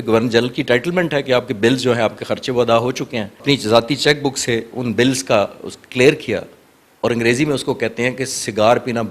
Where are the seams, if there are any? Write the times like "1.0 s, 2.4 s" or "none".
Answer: 3.4 s